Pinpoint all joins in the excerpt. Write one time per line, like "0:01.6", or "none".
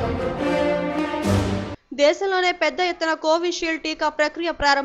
0:01.7